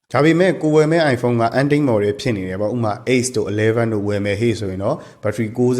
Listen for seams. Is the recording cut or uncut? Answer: uncut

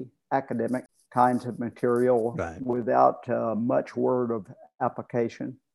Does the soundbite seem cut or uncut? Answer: cut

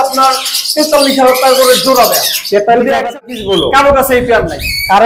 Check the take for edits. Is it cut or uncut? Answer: cut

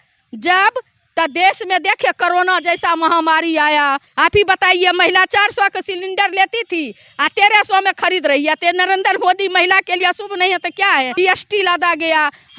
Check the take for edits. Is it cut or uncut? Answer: cut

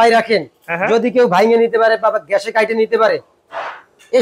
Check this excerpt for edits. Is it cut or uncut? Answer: uncut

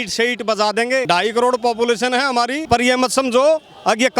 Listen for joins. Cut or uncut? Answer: cut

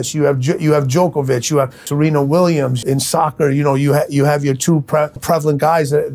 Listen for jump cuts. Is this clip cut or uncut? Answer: cut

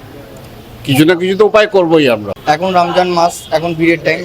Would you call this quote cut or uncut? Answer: cut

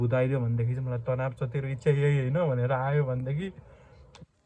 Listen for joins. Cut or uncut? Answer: uncut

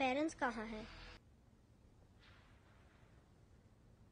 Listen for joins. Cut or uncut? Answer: cut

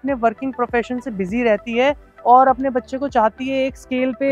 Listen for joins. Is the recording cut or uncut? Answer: uncut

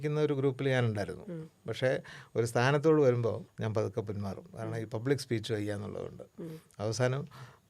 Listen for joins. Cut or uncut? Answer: cut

